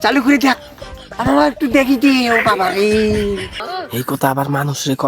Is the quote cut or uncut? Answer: cut